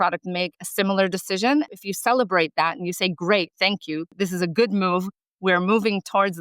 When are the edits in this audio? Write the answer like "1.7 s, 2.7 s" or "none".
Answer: 1.7 s, 4.1 s